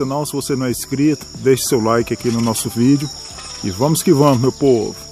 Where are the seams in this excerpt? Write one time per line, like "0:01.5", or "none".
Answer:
none